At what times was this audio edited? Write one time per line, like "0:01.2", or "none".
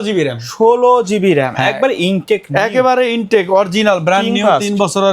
none